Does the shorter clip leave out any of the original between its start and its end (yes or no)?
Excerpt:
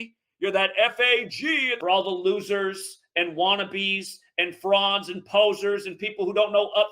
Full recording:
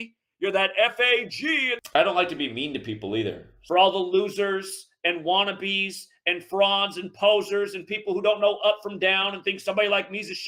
yes